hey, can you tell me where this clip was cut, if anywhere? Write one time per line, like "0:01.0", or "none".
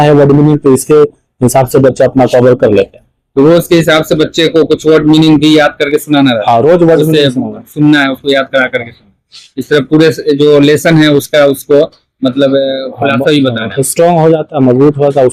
none

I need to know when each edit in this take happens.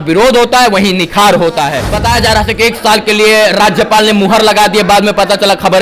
0:01.9

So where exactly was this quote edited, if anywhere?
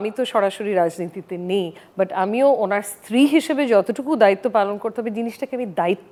none

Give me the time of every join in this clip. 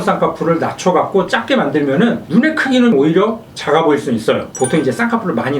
0:04.5

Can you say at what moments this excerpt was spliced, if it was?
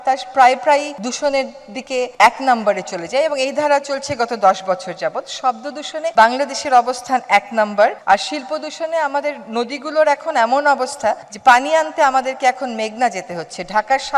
0:00.9
0:02.1
0:06.1
0:08.0

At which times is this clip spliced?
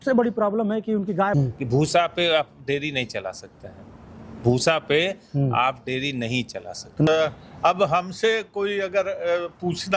0:01.3
0:07.1

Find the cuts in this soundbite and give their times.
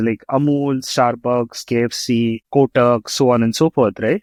none

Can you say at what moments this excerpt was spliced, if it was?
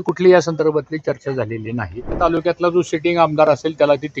0:02.2

